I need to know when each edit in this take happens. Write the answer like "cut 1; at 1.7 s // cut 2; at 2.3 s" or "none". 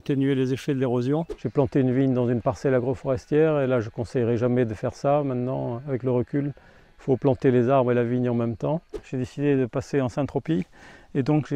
cut 1; at 1.4 s // cut 2; at 9.0 s